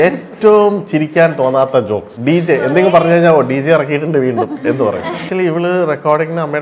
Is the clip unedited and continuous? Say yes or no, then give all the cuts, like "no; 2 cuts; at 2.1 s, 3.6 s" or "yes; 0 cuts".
no; 2 cuts; at 2.1 s, 5.3 s